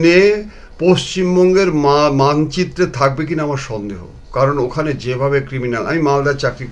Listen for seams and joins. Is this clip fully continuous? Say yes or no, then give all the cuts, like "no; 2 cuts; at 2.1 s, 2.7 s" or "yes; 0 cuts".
yes; 0 cuts